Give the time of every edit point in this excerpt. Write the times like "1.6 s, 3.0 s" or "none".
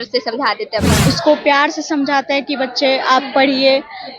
1.0 s